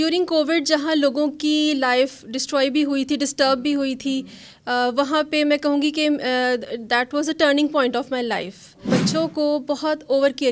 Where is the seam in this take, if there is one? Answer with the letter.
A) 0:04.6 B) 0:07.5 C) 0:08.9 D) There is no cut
C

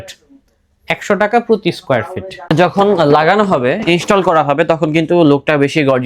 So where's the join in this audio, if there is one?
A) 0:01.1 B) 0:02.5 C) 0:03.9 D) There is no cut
B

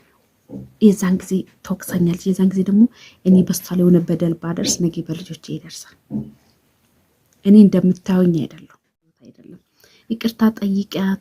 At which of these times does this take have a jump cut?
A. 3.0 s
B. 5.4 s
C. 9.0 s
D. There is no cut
C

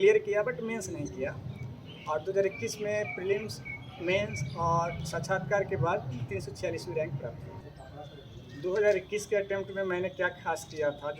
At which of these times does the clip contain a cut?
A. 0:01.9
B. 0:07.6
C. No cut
B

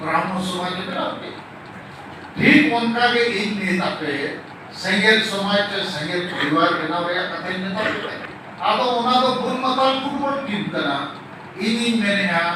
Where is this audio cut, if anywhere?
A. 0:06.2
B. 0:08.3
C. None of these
B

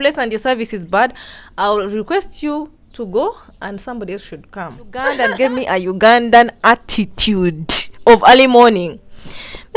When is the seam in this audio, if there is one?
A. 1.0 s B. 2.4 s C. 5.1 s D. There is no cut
C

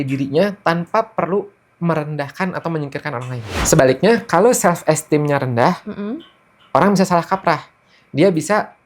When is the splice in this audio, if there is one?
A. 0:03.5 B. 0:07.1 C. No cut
A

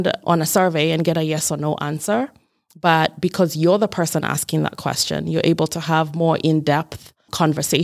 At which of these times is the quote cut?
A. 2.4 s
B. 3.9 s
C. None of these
C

